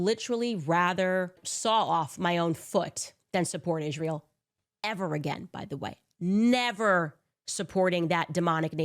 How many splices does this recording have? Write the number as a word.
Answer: one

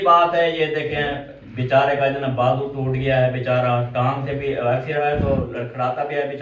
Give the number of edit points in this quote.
one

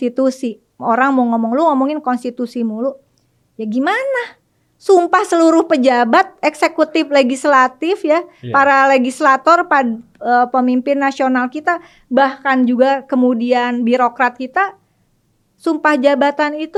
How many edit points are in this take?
zero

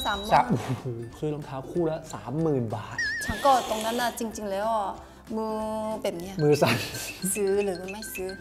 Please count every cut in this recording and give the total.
zero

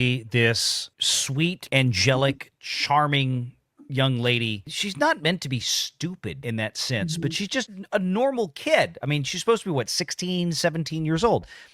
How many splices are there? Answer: two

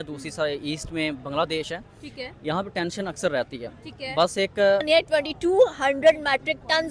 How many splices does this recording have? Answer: one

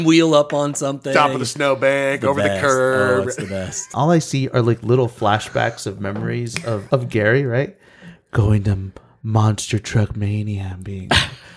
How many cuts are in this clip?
two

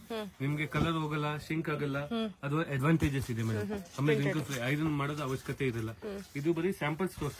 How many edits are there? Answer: zero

